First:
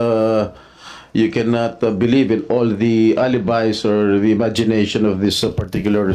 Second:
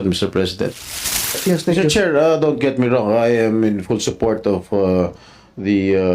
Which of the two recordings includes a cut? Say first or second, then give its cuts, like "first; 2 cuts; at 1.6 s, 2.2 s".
second; 1 cut; at 1.4 s